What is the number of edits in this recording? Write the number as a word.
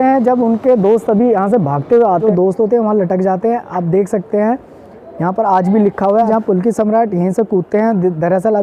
two